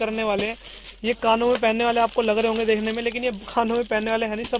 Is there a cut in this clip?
no; 0 cuts

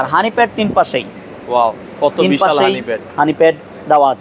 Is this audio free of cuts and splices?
yes; 0 cuts

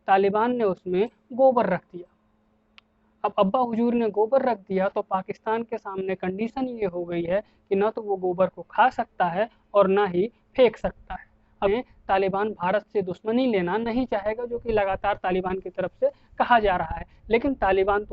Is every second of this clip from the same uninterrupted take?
no; 1 cut; at 11.7 s

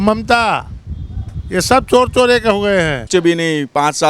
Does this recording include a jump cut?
yes; 1 cut; at 3.1 s

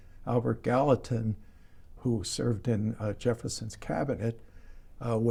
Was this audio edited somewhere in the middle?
no; 0 cuts

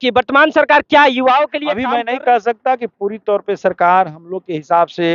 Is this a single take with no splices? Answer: no; 1 cut; at 1.8 s

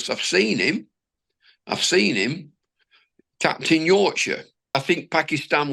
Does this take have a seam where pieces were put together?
yes; 1 cut; at 4.7 s

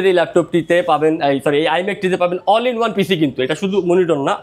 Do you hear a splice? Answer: no; 0 cuts

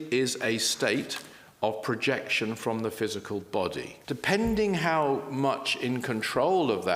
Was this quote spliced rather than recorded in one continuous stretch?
yes; 1 cut; at 3.9 s

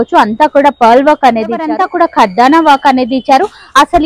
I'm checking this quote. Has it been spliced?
yes; 1 cut; at 1.7 s

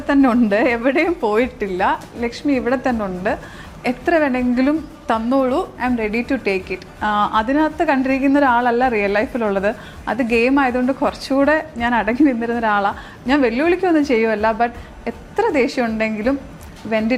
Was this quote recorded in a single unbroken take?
yes; 0 cuts

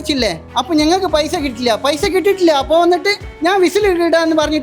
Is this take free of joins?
yes; 0 cuts

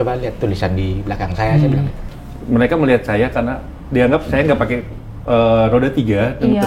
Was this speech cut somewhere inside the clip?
yes; 1 cut; at 2.1 s

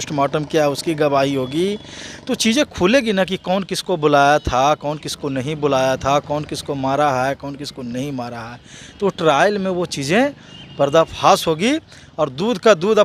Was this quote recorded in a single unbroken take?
yes; 0 cuts

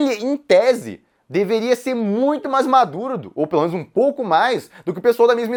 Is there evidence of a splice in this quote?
no; 0 cuts

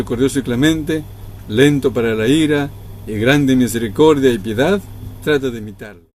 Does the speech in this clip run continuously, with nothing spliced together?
yes; 0 cuts

